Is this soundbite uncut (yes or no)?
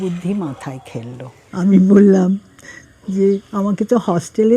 no